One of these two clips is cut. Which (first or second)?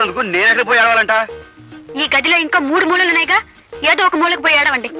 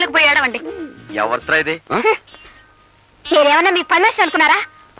second